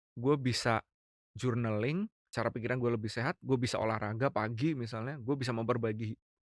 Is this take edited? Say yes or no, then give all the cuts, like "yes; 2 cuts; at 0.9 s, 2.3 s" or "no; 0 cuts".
yes; 1 cut; at 2.2 s